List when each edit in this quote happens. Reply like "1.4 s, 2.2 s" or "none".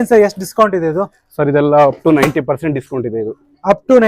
none